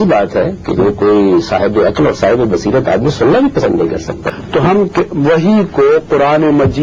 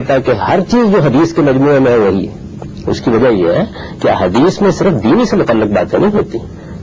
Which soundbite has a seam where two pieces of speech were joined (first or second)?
first